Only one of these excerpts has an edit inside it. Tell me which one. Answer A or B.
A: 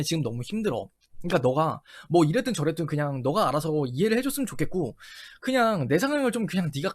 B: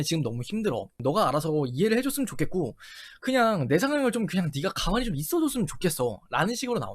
B